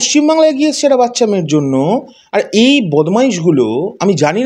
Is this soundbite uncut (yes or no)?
yes